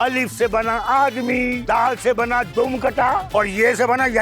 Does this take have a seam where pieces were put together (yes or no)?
yes